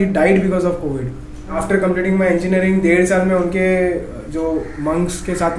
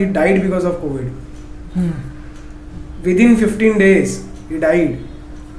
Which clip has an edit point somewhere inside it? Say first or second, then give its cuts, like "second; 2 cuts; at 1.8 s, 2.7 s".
first; 1 cut; at 1.6 s